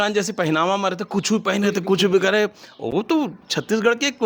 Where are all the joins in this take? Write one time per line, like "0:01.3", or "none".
none